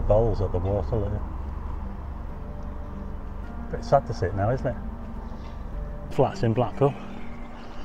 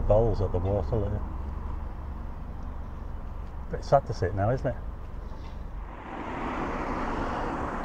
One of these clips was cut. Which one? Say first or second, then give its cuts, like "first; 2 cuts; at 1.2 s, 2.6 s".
first; 1 cut; at 6.1 s